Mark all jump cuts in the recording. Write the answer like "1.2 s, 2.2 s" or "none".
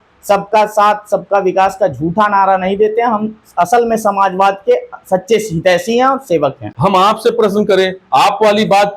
6.7 s